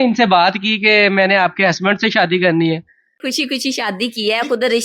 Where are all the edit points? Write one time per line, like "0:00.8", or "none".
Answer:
0:03.2